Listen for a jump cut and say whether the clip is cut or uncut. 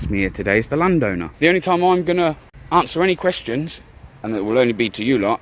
cut